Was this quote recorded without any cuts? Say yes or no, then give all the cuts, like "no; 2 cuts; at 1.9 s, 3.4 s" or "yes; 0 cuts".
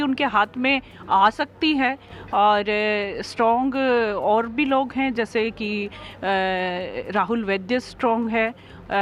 yes; 0 cuts